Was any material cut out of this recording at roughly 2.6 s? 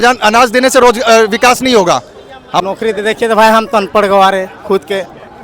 yes; 1 cut; at 2.6 s

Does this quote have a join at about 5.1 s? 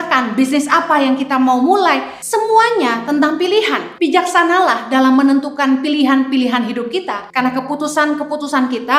no; 3 cuts; at 2.1 s, 3.8 s, 7.2 s

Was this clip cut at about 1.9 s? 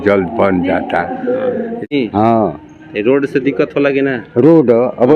yes; 1 cut; at 1.9 s

